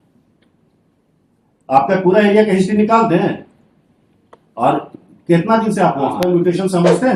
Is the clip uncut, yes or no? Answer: no